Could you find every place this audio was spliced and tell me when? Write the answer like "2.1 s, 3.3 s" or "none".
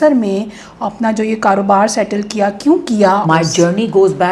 3.2 s